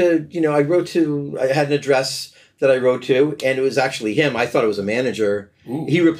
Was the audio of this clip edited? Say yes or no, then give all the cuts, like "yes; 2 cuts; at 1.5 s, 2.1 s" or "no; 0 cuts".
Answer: no; 0 cuts